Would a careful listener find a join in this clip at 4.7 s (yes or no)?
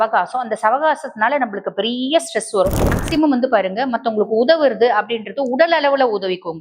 no